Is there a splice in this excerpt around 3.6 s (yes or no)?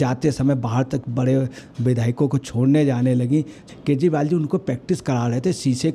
yes